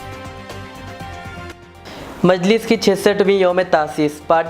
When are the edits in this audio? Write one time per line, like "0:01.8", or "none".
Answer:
0:01.5